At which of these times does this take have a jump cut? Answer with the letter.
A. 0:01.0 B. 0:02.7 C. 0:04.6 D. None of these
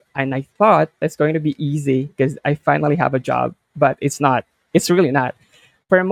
A